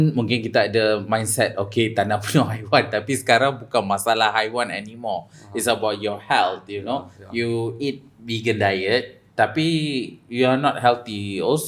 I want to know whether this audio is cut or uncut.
uncut